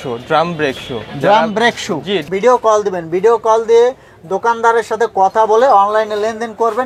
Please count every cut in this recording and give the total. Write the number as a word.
one